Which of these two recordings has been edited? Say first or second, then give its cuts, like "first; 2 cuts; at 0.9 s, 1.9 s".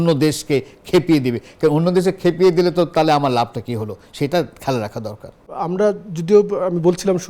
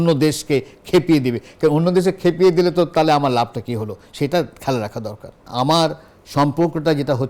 second; 1 cut; at 5.5 s